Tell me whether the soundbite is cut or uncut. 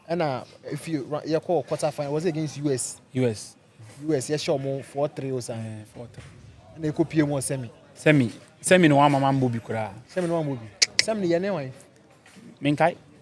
uncut